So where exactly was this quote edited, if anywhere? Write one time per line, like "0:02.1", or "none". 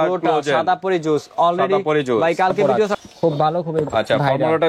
0:03.0